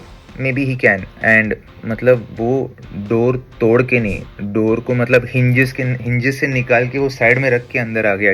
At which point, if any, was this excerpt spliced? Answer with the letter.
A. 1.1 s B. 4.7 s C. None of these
A